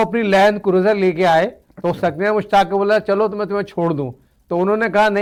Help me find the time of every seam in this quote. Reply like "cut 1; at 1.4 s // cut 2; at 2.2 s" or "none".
none